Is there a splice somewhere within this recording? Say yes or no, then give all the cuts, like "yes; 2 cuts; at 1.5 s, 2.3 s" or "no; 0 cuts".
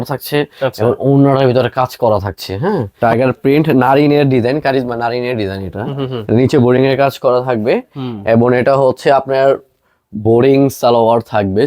yes; 1 cut; at 2.9 s